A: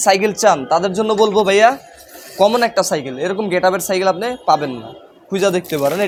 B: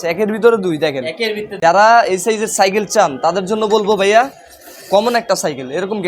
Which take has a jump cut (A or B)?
B